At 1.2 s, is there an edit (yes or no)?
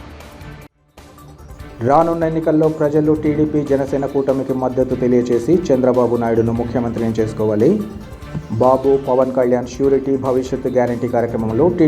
yes